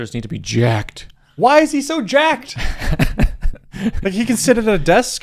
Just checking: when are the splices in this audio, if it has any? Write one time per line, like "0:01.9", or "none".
none